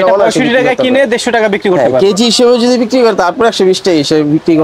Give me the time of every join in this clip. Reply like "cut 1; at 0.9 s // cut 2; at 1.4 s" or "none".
none